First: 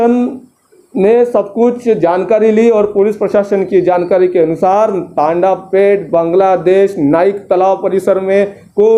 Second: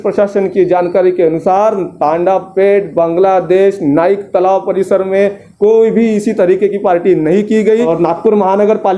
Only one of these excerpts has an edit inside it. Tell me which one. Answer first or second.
second